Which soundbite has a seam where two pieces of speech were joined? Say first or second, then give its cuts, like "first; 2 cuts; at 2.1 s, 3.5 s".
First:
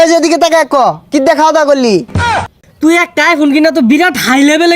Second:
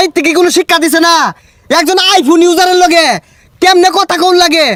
first; 1 cut; at 2.2 s